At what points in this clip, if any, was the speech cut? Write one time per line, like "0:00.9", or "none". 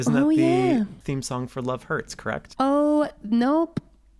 0:01.0
0:02.5